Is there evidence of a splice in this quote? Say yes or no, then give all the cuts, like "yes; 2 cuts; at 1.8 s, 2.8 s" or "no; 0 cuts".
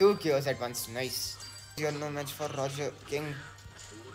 yes; 1 cut; at 1.8 s